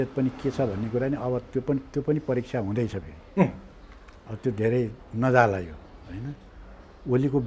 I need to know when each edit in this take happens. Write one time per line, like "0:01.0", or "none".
none